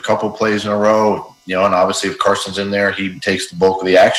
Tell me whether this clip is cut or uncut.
uncut